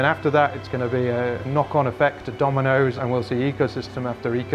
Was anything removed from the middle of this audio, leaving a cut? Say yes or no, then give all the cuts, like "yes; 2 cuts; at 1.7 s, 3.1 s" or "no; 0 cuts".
yes; 2 cuts; at 1.4 s, 2.9 s